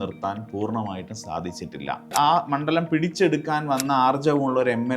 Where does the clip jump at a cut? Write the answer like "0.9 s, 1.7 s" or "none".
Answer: 2.1 s